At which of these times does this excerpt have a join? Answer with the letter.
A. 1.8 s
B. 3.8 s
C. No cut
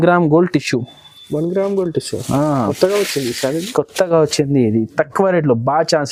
C